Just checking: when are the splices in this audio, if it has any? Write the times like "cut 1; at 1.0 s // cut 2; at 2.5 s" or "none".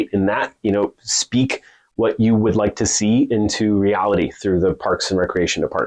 none